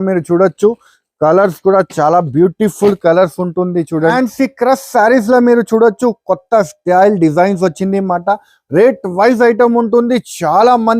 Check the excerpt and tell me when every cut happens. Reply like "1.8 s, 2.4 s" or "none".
3.9 s